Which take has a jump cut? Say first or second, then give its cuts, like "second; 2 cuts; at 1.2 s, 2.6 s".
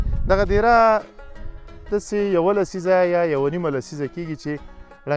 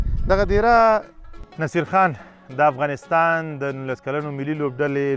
second; 1 cut; at 1.7 s